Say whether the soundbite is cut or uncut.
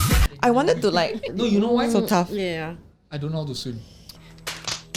cut